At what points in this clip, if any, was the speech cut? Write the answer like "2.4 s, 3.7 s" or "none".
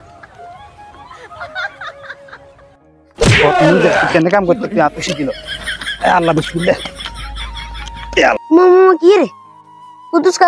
8.4 s

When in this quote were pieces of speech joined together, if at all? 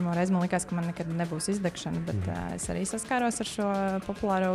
none

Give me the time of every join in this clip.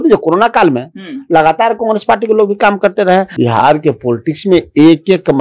3.3 s

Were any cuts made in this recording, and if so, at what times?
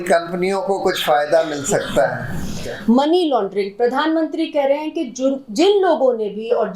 2.5 s

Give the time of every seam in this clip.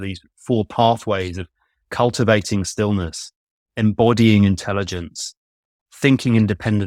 none

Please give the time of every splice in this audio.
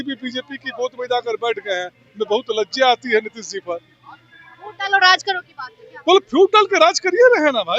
none

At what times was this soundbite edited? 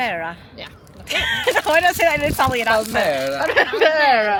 none

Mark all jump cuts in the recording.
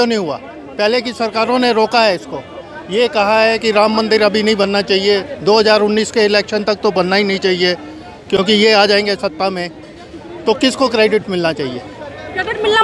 none

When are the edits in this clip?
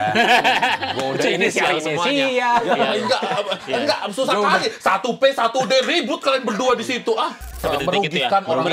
7.6 s

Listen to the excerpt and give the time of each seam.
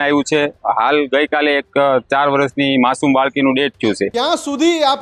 4.1 s

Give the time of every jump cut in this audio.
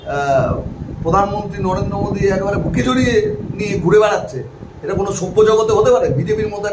none

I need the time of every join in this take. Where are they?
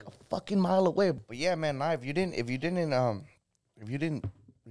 1.2 s

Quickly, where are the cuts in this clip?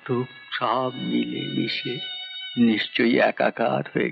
none

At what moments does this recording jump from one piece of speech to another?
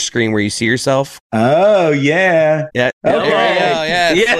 1.2 s

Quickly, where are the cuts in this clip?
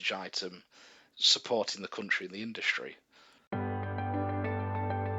3.5 s

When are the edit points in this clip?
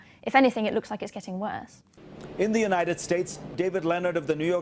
2.2 s

